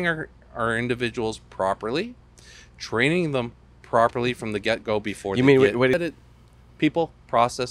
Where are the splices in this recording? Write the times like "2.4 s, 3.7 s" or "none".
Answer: 6.0 s